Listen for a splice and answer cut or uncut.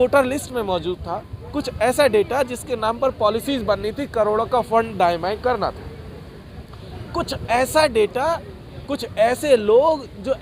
uncut